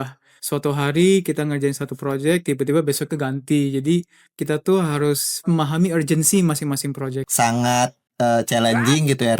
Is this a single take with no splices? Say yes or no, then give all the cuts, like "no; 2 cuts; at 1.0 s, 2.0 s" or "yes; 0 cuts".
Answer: no; 1 cut; at 7.2 s